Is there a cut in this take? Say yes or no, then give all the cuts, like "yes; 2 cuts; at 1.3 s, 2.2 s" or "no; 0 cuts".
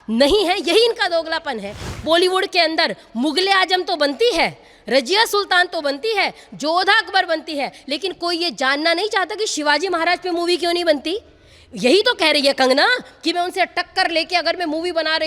yes; 1 cut; at 2.0 s